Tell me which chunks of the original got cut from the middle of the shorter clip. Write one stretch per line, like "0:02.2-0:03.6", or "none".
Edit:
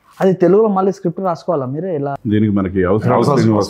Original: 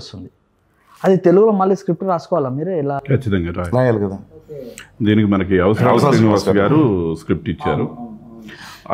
0:03.0-0:04.9